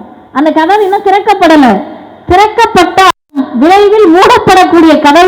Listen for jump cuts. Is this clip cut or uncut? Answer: uncut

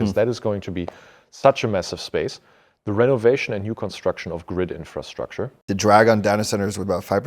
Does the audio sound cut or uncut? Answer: cut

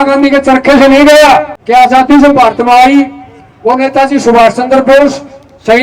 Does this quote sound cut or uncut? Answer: cut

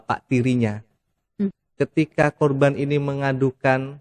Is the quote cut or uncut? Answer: cut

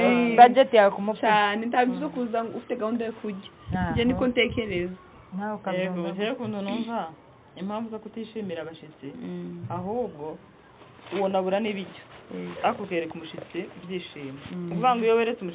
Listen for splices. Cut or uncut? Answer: uncut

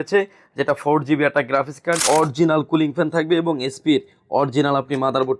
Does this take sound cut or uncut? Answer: cut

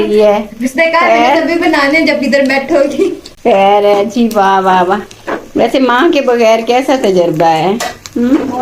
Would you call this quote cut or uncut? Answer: uncut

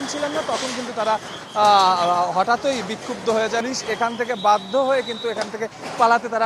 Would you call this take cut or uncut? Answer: cut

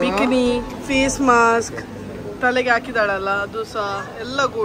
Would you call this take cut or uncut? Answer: uncut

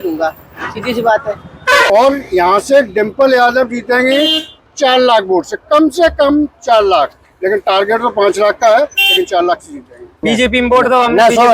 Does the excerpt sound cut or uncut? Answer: cut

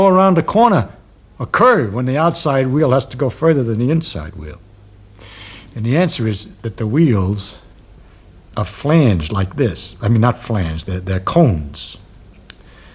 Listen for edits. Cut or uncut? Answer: uncut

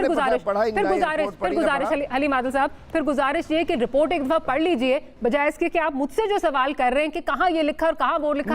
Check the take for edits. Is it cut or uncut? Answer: uncut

